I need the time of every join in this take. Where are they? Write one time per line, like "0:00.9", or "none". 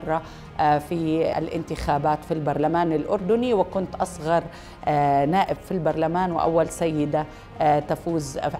0:01.3